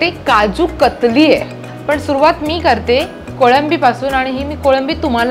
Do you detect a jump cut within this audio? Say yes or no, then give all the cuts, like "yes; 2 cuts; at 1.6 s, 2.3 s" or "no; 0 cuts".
yes; 1 cut; at 1.6 s